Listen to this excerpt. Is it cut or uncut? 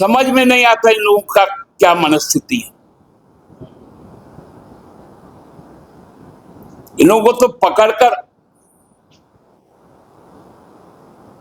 uncut